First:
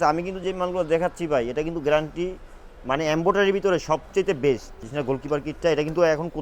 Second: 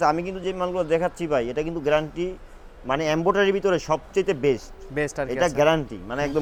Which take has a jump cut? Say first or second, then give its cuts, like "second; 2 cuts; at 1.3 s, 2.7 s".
first; 1 cut; at 4.9 s